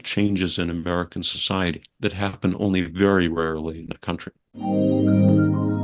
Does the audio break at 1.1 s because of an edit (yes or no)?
no